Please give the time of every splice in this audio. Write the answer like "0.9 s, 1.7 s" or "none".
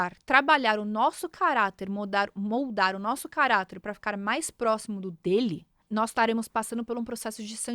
5.7 s